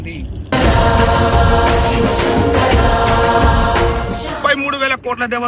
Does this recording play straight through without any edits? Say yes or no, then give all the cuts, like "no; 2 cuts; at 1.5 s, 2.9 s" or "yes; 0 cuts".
no; 1 cut; at 4.4 s